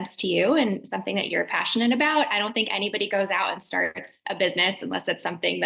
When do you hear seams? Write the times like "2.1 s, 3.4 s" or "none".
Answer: none